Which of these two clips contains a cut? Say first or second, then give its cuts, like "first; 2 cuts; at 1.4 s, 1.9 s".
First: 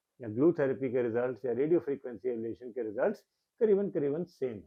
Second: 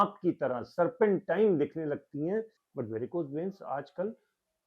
second; 1 cut; at 2.6 s